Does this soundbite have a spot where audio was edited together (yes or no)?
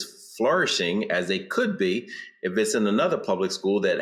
no